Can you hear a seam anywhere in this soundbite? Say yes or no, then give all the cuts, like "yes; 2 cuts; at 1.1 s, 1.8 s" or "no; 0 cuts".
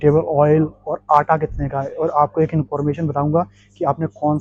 no; 0 cuts